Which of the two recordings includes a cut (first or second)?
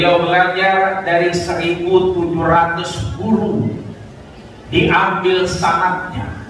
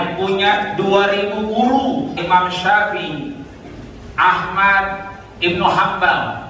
second